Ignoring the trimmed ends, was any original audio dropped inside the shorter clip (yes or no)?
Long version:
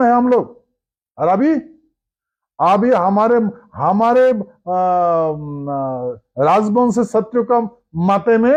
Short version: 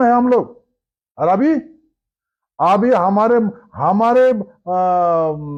no